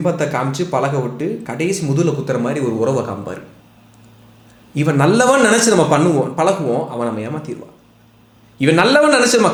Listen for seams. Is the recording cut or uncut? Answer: uncut